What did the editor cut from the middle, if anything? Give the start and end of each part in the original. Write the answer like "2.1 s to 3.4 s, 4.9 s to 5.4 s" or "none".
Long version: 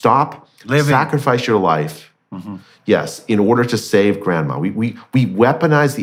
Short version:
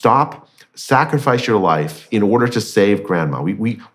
2.0 s to 3.2 s